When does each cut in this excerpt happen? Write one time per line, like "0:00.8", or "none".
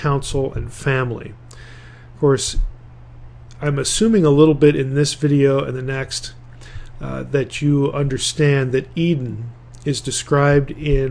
0:05.1